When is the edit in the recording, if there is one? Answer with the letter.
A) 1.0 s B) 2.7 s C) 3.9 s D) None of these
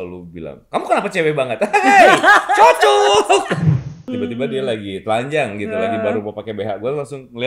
C